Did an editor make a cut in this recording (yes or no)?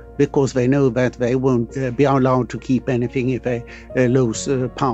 yes